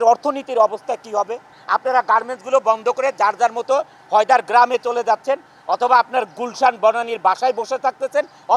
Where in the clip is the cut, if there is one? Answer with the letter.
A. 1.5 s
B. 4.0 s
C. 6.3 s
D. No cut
A